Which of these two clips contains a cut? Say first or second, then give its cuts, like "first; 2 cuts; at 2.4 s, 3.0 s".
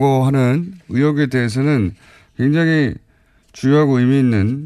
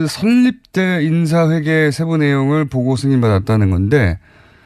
second; 1 cut; at 1.3 s